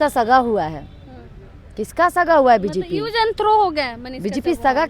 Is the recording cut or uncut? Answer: uncut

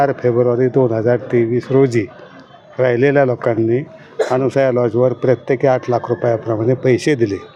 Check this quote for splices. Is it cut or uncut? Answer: uncut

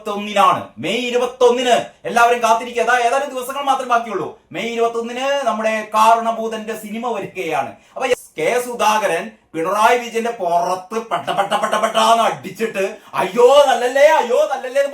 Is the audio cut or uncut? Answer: cut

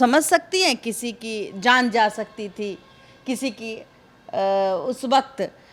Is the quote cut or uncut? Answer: uncut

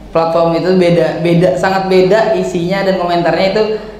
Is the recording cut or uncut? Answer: uncut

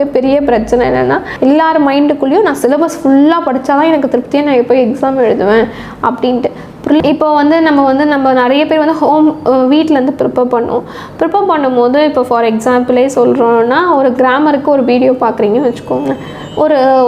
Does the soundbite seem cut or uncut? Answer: cut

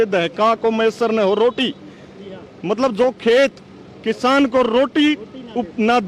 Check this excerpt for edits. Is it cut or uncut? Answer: uncut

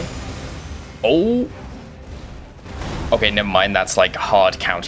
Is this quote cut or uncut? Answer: uncut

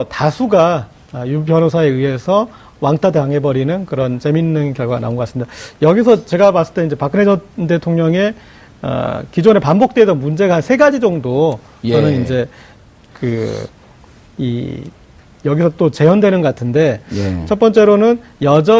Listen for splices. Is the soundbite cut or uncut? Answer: uncut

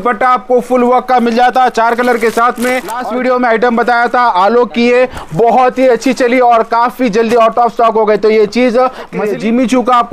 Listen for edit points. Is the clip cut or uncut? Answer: cut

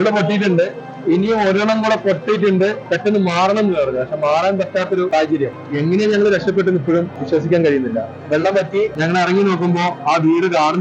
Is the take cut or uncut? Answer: cut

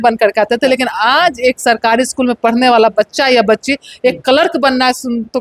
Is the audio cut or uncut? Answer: uncut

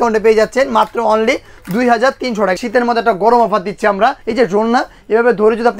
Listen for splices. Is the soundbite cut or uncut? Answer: cut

